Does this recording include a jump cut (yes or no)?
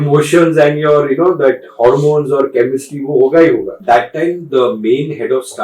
yes